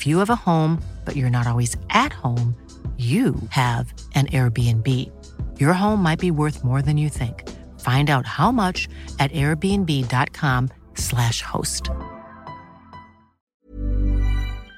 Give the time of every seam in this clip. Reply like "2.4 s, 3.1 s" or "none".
13.5 s